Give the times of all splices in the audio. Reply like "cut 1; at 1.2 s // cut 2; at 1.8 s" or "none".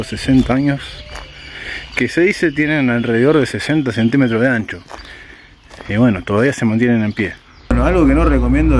cut 1; at 7.7 s